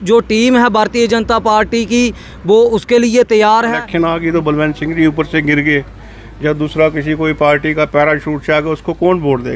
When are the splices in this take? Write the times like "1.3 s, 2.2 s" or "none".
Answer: 3.8 s